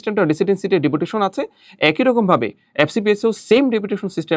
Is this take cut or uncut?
uncut